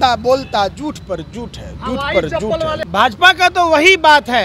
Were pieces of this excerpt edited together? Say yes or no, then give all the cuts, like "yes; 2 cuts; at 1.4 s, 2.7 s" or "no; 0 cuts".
yes; 1 cut; at 2.8 s